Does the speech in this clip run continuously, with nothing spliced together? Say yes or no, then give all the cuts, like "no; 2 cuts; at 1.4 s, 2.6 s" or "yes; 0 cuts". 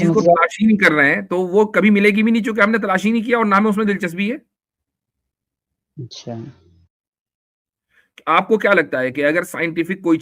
yes; 0 cuts